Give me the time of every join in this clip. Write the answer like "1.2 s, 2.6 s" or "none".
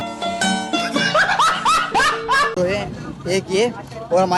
2.5 s